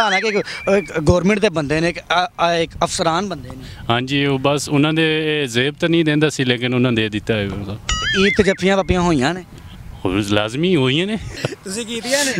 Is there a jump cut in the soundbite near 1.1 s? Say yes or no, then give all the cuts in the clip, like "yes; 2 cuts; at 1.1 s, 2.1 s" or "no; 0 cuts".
no; 1 cut; at 11.3 s